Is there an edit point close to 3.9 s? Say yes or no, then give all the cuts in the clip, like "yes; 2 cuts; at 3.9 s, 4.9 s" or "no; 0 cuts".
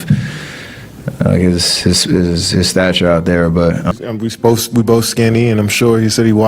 yes; 1 cut; at 3.9 s